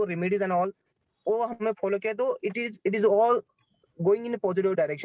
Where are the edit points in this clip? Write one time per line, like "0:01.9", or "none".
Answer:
none